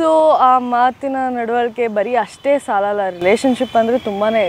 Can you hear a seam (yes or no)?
no